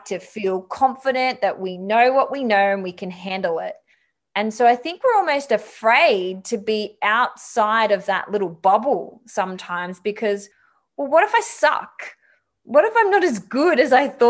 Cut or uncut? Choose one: uncut